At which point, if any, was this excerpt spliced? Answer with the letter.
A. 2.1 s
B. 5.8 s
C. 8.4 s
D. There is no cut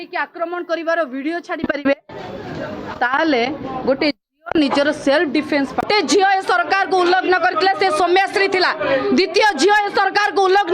B